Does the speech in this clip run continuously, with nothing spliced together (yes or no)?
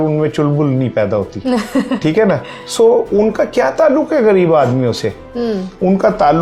yes